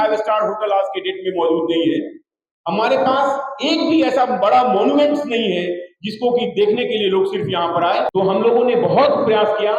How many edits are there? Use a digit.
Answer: 1